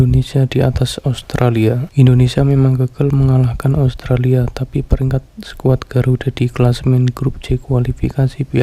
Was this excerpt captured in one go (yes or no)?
no